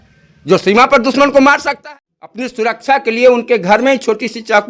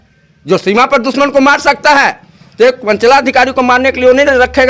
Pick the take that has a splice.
first; 1 cut; at 1.6 s

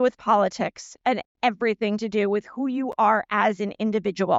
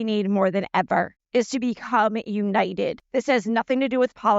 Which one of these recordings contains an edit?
second; 2 cuts; at 1.2 s, 3.0 s

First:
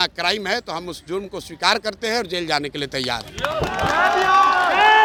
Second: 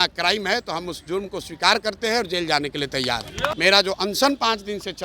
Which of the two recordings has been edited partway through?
second; 1 cut; at 3.5 s

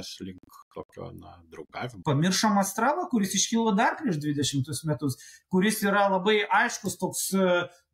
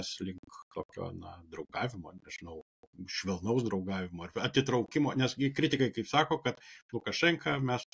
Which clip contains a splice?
first; 1 cut; at 1.9 s

